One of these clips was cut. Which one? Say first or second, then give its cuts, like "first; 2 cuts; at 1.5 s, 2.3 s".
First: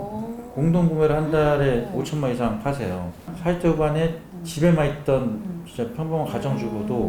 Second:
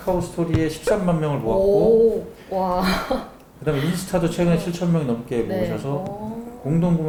first; 1 cut; at 3.3 s